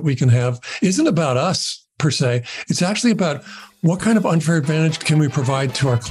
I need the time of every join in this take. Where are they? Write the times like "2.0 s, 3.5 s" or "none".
5.0 s